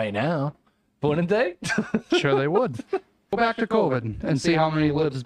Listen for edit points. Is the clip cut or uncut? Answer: cut